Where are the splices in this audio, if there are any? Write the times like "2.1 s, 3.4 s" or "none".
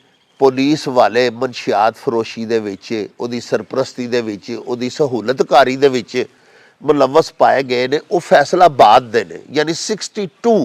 none